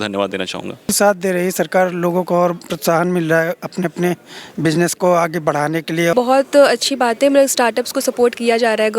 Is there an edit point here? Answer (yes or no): yes